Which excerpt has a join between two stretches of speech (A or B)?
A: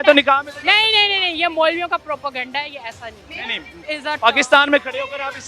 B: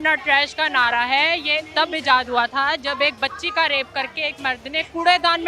A